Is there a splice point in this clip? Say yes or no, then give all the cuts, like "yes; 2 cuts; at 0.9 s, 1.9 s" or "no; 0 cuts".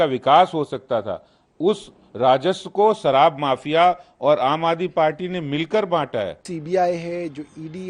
yes; 1 cut; at 6.4 s